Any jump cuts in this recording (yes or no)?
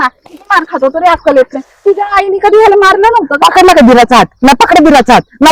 no